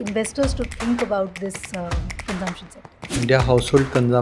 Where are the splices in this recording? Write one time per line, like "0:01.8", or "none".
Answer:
0:03.2

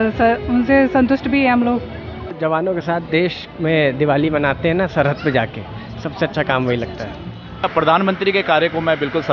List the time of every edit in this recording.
0:02.3
0:07.6

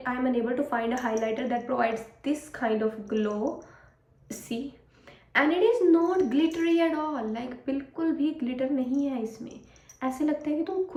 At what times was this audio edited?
none

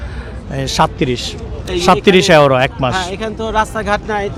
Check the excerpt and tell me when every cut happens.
none

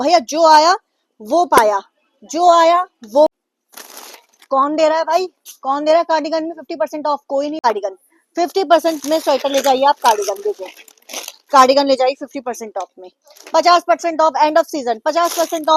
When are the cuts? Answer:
0:03.3
0:07.7

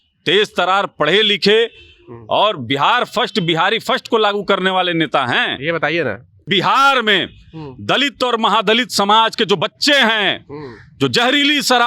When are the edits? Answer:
0:06.5

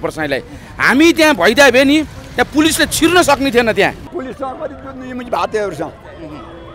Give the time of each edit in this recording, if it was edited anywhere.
0:04.1

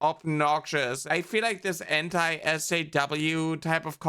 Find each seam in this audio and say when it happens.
0:01.0

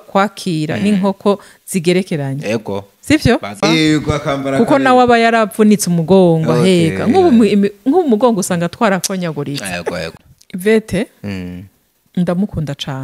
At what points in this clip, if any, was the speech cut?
0:03.6
0:10.2

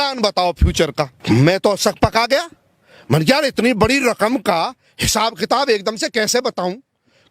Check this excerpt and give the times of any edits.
0:01.2

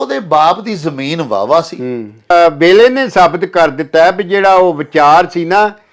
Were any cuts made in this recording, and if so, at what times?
0:02.3

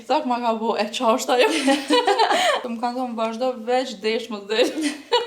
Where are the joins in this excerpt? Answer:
0:02.6

